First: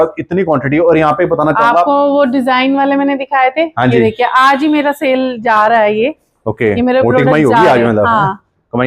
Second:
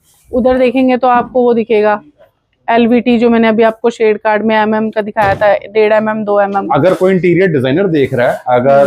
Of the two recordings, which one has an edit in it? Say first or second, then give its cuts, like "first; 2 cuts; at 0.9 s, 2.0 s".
second; 1 cut; at 6.7 s